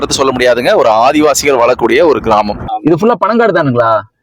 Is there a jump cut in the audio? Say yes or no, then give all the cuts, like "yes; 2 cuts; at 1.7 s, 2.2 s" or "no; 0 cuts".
yes; 1 cut; at 2.6 s